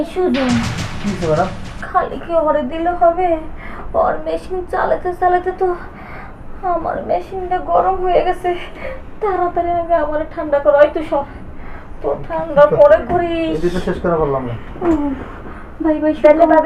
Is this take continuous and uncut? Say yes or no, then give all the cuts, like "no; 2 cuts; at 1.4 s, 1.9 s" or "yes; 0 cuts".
yes; 0 cuts